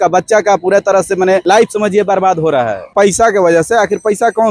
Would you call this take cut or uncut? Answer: cut